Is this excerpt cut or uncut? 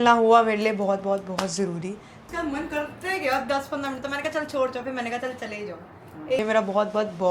cut